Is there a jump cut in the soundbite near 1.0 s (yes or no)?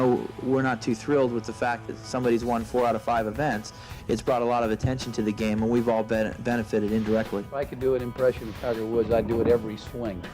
no